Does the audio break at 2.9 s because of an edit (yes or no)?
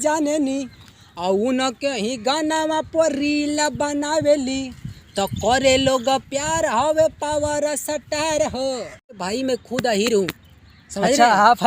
no